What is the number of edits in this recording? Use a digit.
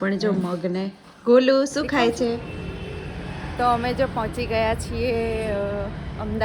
1